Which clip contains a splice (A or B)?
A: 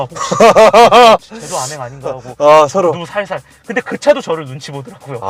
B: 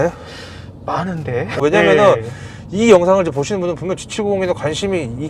B